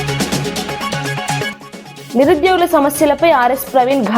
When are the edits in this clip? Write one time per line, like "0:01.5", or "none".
0:01.6